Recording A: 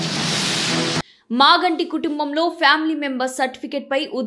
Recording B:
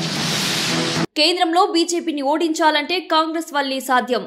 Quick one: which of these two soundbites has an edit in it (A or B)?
A